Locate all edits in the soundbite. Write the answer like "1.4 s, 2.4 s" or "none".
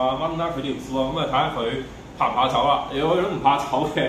none